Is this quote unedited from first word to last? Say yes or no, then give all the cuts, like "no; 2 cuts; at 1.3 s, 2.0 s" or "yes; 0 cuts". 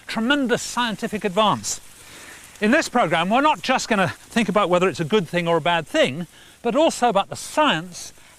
no; 1 cut; at 3.2 s